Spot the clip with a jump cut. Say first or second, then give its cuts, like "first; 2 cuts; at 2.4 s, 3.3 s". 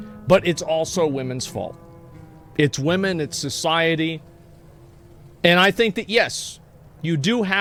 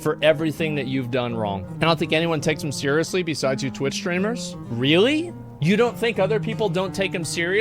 second; 3 cuts; at 1.7 s, 4.6 s, 5.4 s